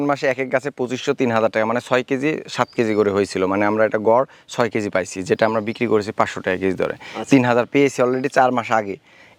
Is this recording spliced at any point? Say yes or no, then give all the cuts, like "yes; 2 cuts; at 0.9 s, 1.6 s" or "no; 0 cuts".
no; 0 cuts